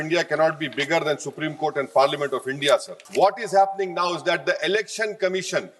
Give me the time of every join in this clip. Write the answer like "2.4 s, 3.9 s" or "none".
3.0 s